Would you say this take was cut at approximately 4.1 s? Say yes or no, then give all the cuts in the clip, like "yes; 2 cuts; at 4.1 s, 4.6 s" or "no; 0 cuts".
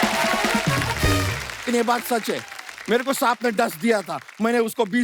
no; 0 cuts